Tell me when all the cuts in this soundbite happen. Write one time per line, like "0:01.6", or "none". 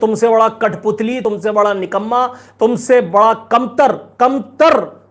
0:01.2